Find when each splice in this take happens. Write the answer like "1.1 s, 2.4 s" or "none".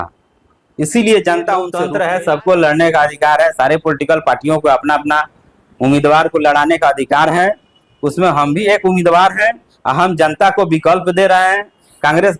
1.8 s